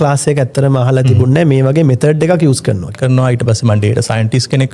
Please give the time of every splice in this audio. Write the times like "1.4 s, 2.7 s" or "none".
2.9 s